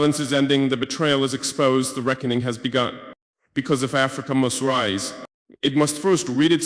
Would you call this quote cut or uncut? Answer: uncut